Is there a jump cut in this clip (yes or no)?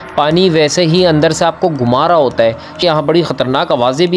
yes